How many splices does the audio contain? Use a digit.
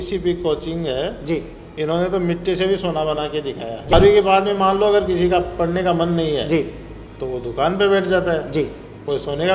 1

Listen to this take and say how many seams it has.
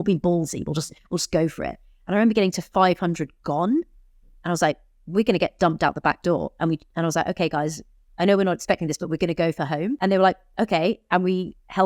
1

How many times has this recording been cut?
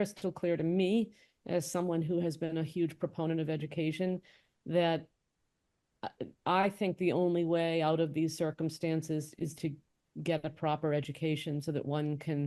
0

